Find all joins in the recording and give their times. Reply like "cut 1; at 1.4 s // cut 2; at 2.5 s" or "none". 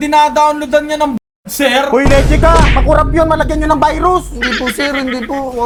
none